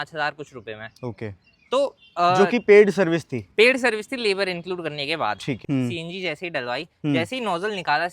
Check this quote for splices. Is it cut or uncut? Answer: cut